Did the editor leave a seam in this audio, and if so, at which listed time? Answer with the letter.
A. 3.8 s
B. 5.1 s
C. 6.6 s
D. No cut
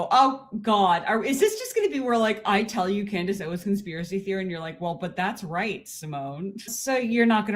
C